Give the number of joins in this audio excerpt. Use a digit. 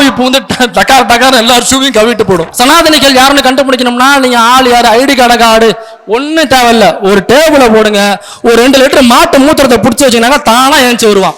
1